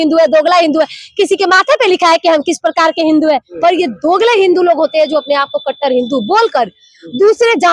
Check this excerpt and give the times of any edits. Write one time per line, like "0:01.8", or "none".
0:03.5